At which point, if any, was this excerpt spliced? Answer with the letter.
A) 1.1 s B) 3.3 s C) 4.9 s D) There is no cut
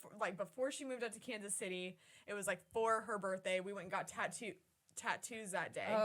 D